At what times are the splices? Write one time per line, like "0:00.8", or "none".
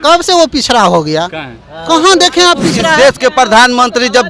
0:02.9